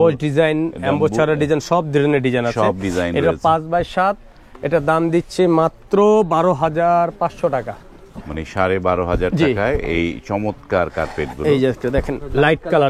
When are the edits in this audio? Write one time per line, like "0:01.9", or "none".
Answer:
none